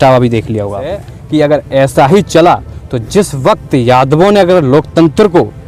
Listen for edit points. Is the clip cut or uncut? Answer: cut